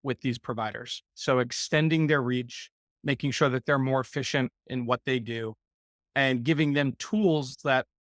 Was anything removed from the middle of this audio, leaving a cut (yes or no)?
no